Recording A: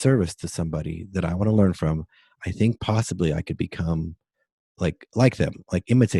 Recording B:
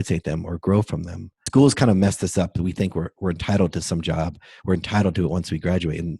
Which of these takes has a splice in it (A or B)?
B